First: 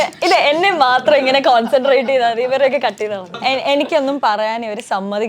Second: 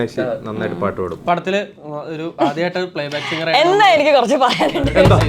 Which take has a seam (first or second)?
first